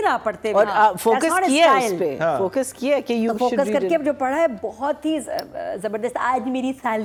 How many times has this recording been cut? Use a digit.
0